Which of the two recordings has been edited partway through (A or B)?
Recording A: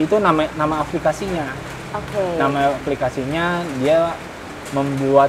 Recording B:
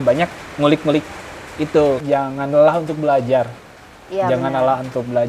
B